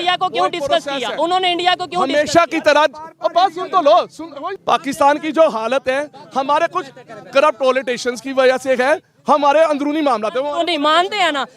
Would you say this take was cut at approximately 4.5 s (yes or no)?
yes